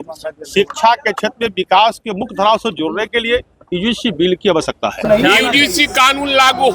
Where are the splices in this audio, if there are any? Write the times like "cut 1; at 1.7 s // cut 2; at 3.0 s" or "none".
cut 1; at 5.0 s